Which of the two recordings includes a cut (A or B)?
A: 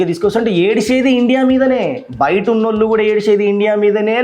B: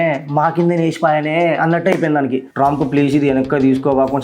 B